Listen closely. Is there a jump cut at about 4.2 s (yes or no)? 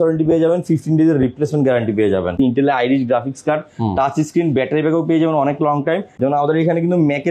no